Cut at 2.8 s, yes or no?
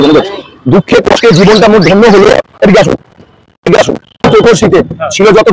no